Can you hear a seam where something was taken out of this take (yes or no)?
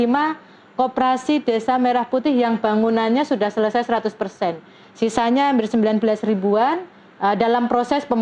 no